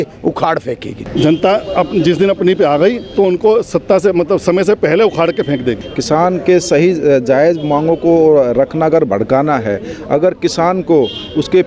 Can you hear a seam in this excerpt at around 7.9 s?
no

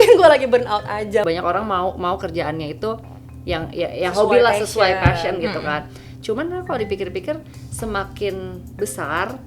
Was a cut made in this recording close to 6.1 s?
no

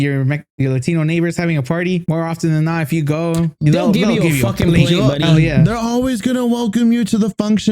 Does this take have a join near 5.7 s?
no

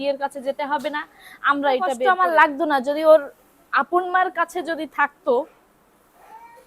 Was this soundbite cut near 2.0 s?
yes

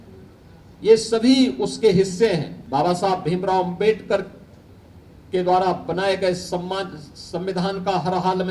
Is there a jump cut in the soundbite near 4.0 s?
no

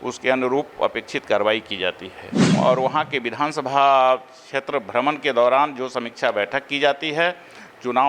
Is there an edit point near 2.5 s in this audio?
yes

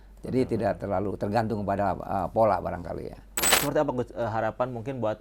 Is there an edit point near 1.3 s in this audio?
no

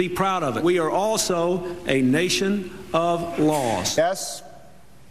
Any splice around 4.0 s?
yes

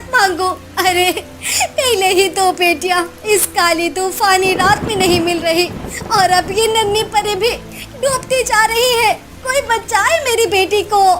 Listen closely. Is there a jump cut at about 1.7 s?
no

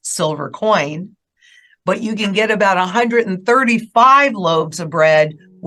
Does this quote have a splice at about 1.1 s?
no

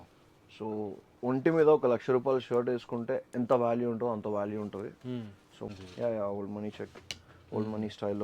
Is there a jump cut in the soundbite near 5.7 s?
yes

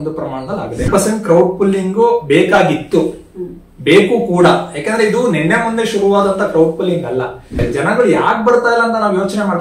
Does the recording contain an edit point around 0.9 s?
yes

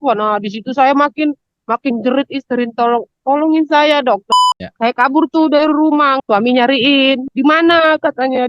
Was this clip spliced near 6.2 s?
yes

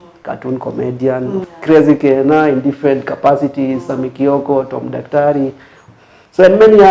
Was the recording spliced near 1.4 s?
yes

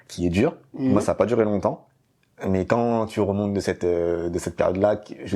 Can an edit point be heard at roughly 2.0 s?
no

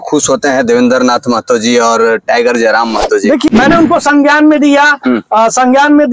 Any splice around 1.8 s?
no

